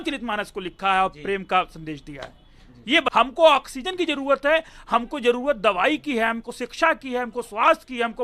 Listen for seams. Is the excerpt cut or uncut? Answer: cut